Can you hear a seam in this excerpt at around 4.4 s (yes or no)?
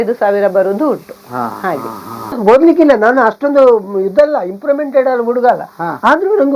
no